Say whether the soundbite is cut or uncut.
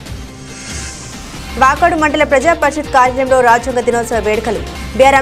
cut